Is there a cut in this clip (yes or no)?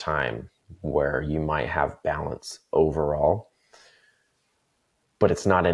no